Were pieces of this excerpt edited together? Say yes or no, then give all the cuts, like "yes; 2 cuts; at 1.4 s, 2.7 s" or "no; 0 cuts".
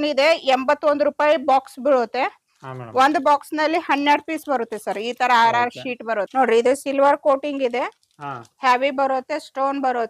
yes; 1 cut; at 6.3 s